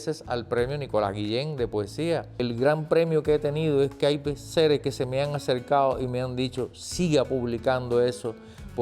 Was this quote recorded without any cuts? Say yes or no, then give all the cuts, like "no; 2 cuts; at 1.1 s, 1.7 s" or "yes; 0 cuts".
no; 1 cut; at 2.4 s